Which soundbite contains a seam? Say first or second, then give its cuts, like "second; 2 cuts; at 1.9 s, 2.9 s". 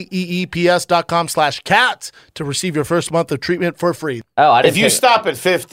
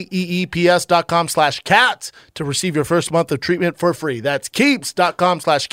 first; 1 cut; at 4.2 s